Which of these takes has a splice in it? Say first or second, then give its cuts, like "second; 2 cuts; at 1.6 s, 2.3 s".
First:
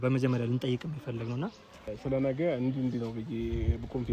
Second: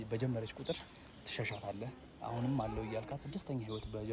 first; 1 cut; at 1.9 s